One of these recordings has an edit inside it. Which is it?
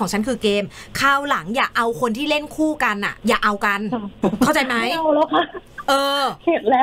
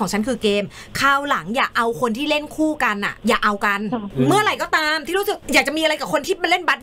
second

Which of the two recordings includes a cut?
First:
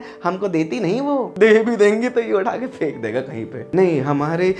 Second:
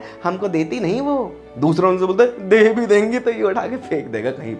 first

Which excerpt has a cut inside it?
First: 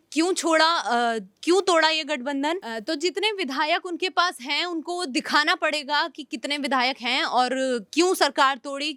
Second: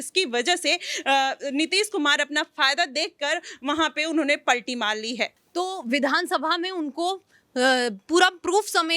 second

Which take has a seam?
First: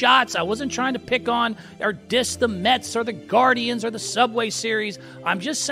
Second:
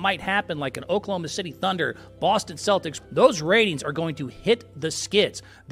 second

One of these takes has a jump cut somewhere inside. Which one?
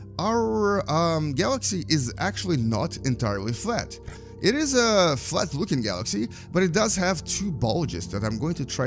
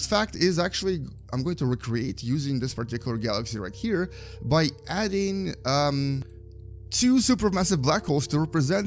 second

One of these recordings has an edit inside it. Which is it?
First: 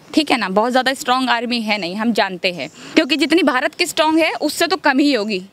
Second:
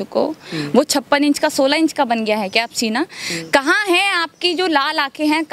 first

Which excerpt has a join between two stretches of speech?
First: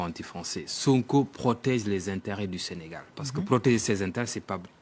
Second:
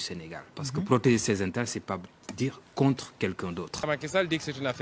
second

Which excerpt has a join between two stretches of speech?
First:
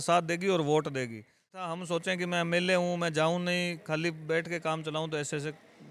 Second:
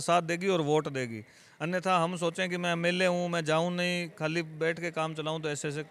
first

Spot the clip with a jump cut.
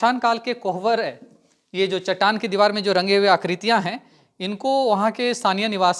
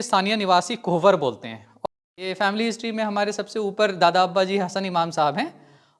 second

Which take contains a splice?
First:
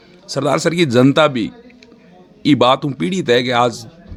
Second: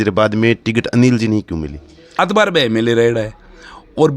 second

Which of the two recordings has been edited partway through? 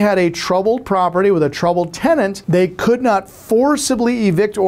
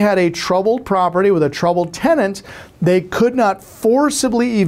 first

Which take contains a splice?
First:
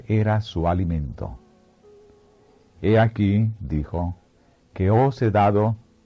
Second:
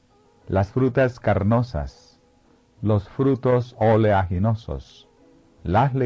first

